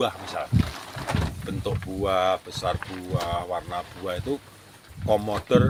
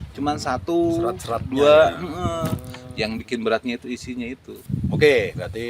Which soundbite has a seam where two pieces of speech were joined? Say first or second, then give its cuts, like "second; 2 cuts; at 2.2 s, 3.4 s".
second; 1 cut; at 4.5 s